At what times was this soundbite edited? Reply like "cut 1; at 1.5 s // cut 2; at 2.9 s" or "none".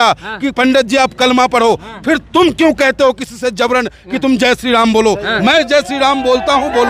none